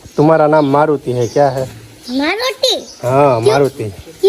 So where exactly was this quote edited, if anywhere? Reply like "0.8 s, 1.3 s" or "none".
none